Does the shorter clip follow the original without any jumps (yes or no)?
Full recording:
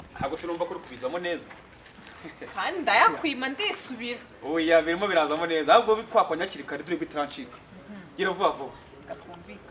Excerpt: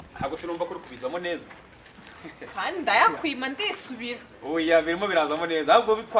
yes